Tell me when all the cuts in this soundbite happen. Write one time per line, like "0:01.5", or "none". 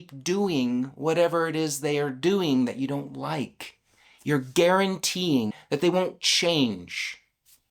0:05.6